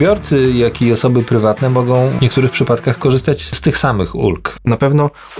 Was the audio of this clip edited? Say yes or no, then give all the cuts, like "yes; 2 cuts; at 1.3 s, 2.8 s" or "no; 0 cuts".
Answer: yes; 3 cuts; at 2.2 s, 3.6 s, 4.5 s